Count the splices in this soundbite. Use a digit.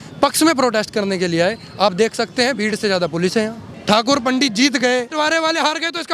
2